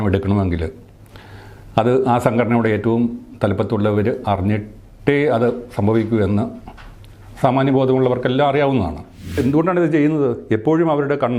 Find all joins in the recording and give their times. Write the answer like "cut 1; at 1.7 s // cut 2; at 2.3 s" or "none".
cut 1; at 9.4 s